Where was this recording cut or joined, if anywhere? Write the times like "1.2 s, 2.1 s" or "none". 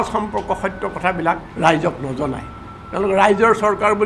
1.5 s